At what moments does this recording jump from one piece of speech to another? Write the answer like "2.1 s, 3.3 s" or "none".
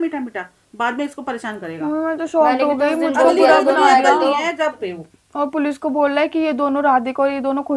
4.8 s